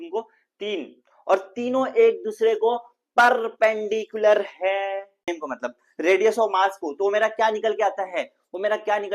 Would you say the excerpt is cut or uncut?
cut